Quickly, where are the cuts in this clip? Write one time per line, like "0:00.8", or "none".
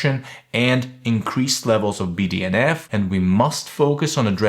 0:02.9